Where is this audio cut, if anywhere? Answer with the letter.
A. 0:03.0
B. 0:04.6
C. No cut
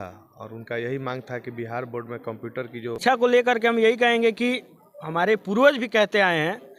A